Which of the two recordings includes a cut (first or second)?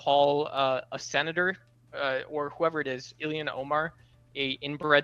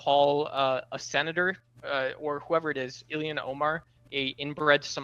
second